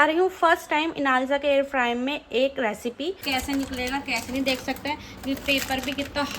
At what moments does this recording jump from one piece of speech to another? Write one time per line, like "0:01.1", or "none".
0:03.2